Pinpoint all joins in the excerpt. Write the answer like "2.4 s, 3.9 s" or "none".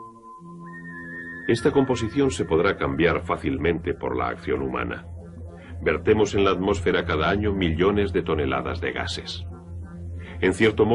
none